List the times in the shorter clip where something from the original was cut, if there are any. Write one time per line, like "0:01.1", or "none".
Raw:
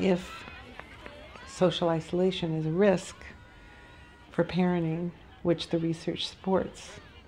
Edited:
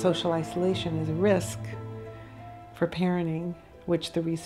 none